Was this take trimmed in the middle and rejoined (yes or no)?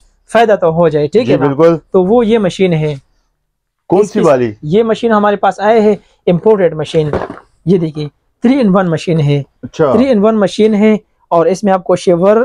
no